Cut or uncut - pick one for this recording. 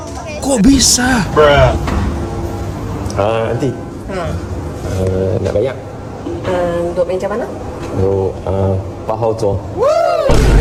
uncut